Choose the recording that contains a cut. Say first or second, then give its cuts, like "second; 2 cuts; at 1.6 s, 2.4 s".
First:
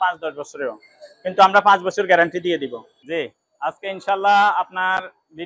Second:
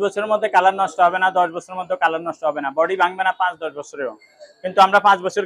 first; 1 cut; at 3.1 s